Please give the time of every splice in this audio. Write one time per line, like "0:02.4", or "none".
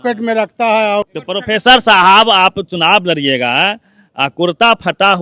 0:01.2